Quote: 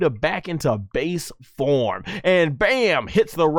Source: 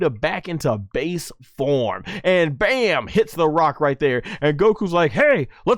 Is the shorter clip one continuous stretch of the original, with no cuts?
yes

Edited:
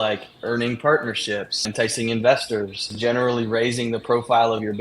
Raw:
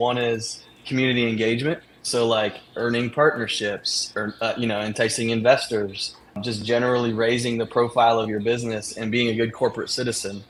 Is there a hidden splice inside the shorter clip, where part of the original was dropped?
yes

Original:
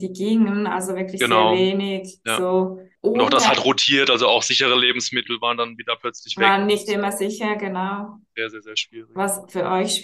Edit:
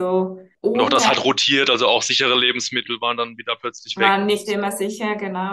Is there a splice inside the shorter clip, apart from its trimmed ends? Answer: no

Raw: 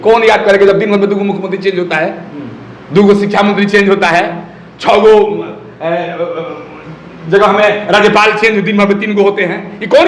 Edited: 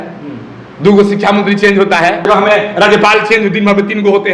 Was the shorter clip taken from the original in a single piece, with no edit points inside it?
no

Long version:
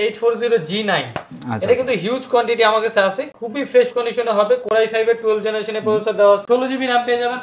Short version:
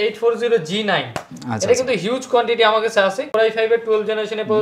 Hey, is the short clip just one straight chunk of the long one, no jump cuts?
no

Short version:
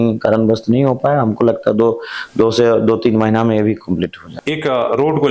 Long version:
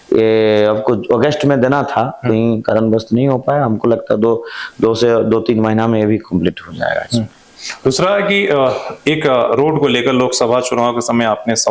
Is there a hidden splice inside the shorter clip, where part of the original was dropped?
yes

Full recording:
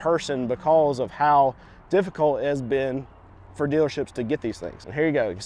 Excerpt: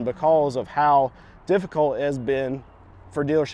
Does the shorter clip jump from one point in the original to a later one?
no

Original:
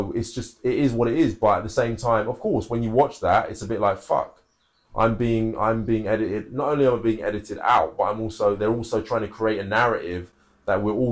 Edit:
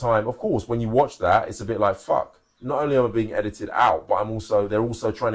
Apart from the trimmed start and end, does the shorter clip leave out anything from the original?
yes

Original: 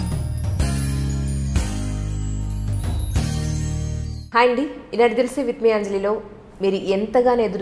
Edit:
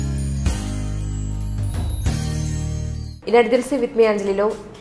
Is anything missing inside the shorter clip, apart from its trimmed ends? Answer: yes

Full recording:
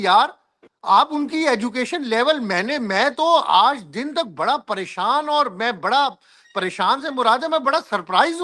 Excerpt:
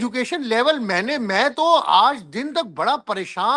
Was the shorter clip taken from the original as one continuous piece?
yes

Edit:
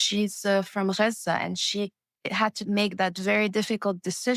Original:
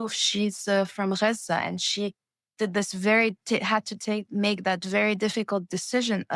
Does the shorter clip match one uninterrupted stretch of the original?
no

